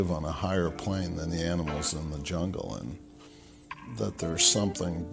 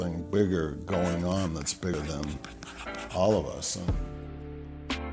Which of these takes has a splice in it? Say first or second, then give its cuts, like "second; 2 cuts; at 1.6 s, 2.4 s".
second; 1 cut; at 1.9 s